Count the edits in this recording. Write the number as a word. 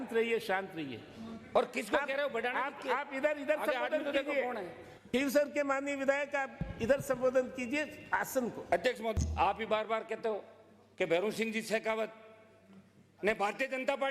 one